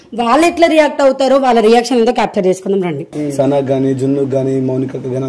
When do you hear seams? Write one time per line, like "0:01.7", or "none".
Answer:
0:03.1